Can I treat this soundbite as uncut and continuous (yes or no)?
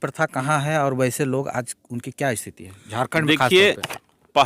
yes